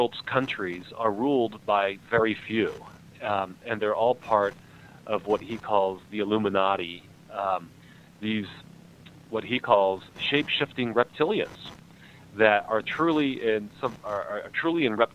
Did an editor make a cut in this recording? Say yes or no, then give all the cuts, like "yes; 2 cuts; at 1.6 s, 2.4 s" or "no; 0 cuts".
no; 0 cuts